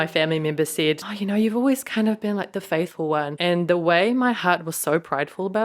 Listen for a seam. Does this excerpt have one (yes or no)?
yes